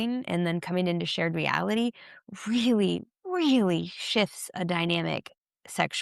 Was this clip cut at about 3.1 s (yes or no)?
yes